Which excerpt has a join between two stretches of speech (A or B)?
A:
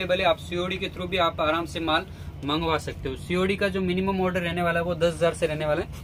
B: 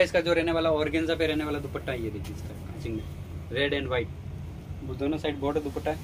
B